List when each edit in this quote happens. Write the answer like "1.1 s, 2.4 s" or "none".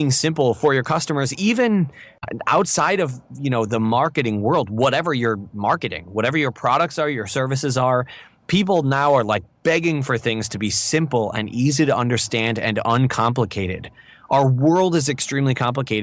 2.3 s